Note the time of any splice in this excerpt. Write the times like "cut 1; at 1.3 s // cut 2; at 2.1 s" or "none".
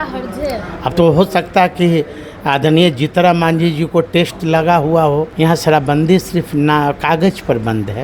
cut 1; at 5.3 s